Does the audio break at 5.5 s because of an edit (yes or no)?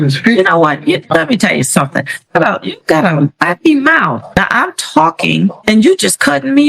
no